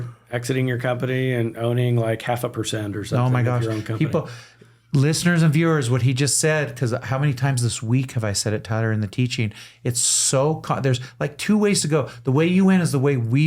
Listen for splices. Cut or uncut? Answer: uncut